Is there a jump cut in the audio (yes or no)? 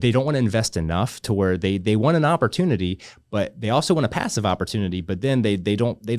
no